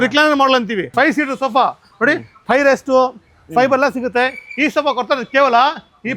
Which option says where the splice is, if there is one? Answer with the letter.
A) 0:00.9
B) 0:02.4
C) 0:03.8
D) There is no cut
A